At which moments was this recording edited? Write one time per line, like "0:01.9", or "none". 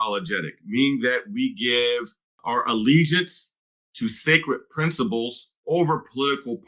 0:02.4